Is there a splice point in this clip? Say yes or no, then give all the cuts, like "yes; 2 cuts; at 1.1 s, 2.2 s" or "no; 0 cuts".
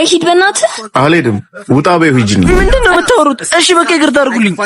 yes; 1 cut; at 2.5 s